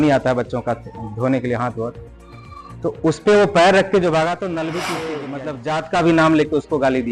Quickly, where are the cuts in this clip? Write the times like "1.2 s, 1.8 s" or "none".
5.2 s